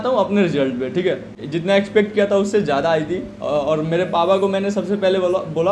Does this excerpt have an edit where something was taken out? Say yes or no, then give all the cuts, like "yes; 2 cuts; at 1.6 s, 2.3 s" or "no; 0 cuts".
yes; 1 cut; at 1.3 s